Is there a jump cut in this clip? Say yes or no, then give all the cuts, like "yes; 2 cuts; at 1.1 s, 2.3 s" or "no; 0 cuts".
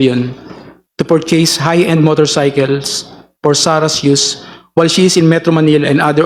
no; 0 cuts